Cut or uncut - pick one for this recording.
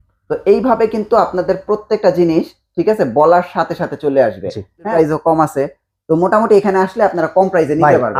uncut